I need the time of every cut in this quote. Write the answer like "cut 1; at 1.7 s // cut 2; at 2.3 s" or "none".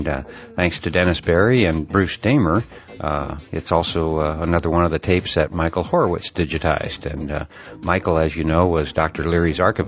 none